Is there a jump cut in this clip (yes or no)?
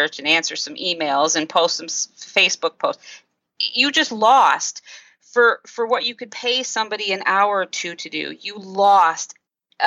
no